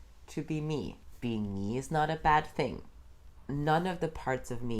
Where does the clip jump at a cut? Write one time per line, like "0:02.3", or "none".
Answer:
0:01.0
0:03.4

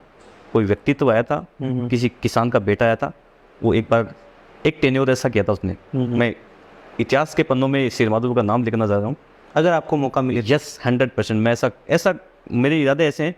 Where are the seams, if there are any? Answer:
none

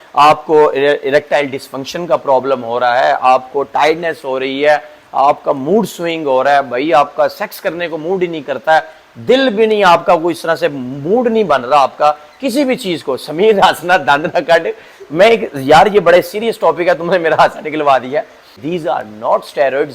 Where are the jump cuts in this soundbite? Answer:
0:18.6

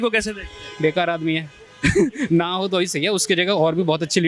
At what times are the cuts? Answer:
none

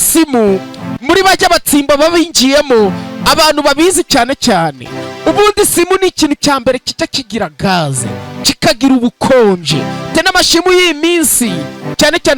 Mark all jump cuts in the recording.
none

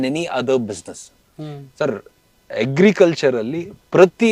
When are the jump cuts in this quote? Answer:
none

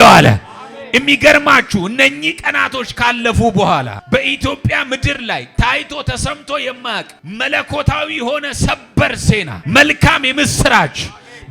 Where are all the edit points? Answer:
0:04.0
0:07.2
0:09.5

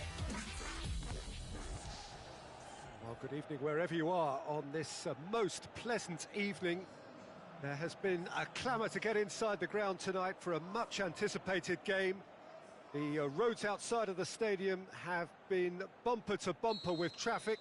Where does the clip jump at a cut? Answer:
0:02.7

